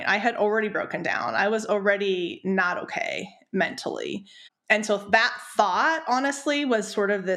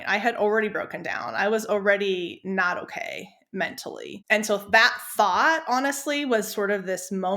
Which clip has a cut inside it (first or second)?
second